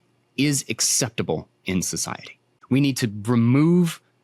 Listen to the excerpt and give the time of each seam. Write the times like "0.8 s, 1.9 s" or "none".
2.5 s